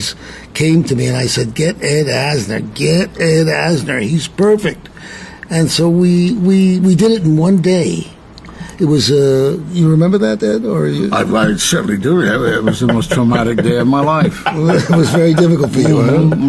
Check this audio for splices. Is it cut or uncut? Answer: uncut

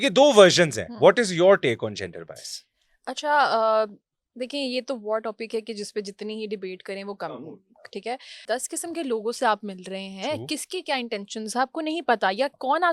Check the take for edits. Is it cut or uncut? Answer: cut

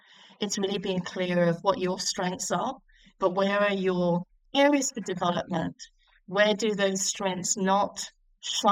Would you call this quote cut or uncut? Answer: cut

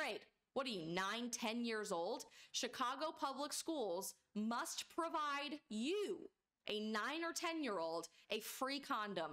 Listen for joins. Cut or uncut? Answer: uncut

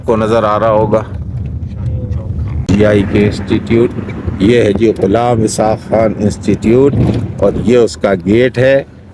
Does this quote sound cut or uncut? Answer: cut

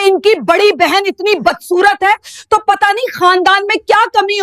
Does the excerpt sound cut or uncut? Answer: uncut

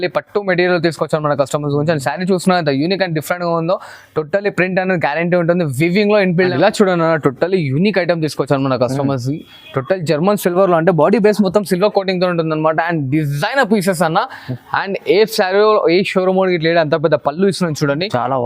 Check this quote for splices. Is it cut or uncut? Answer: cut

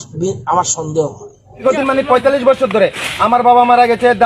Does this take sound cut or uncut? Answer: cut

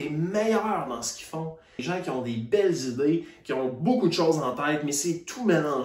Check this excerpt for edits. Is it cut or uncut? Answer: cut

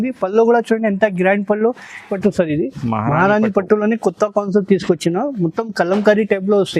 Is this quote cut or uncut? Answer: cut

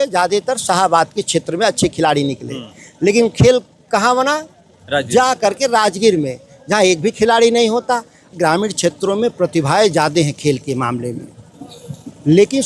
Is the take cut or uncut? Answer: cut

